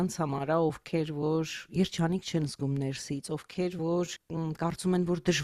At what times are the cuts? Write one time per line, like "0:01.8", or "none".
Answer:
0:04.2